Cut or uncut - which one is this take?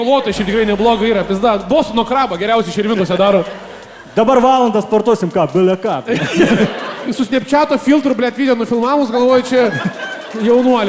cut